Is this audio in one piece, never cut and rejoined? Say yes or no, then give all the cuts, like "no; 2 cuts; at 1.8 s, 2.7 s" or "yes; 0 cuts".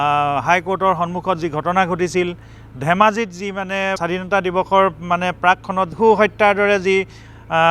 no; 2 cuts; at 4.0 s, 5.9 s